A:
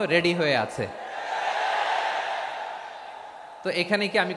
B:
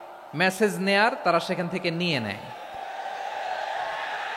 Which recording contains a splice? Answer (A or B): B